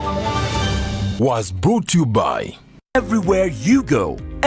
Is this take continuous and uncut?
no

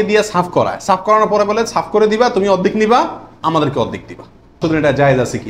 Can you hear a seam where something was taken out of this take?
yes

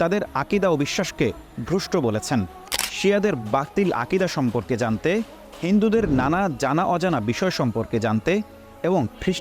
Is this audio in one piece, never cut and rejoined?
no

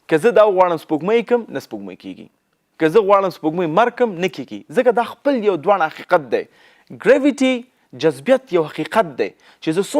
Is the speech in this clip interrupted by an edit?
no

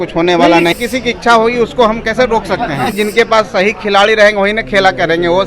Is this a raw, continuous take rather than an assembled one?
no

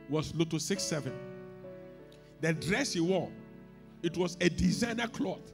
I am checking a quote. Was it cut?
no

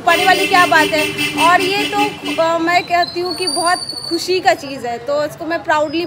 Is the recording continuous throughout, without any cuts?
yes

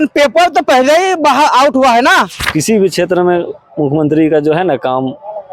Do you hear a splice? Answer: yes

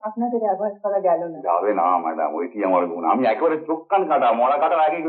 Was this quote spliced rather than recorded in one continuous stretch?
no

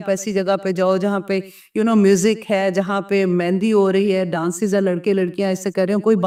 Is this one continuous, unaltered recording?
yes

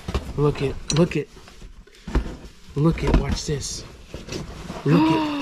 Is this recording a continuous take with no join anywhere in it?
yes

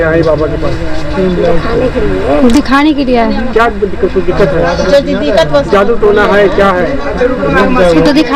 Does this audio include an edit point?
no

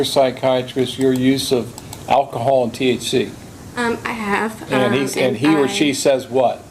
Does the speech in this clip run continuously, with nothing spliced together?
yes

